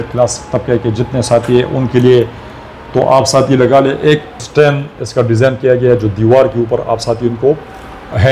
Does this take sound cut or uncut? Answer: cut